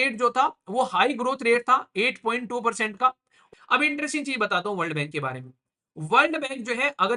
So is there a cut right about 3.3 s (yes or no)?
yes